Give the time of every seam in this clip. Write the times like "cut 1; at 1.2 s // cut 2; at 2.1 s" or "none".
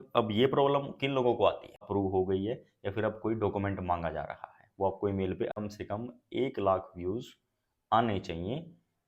cut 1; at 1.9 s // cut 2; at 5.5 s